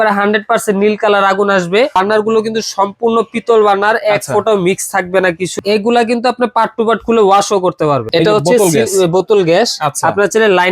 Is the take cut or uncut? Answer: cut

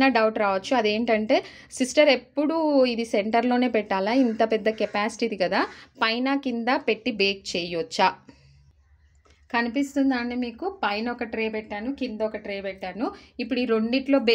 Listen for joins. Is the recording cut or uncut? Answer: uncut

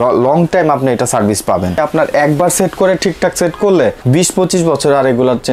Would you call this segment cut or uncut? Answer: cut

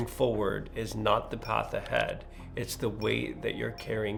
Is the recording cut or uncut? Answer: uncut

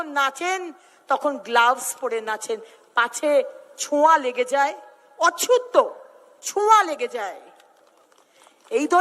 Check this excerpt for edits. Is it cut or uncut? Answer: uncut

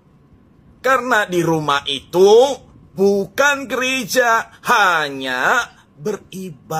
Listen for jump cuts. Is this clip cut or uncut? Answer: uncut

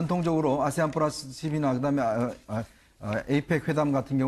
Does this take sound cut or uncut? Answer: cut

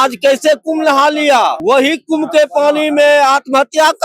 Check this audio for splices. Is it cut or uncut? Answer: cut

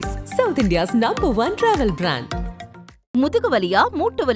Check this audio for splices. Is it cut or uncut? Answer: uncut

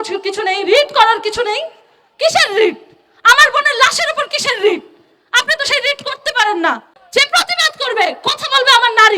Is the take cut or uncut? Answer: cut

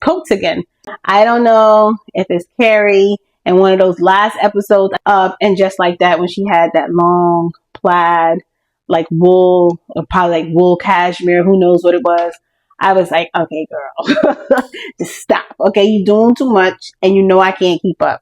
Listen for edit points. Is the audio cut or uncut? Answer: cut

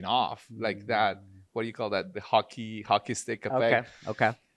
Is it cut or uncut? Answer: uncut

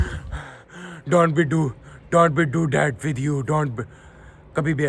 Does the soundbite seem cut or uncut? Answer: uncut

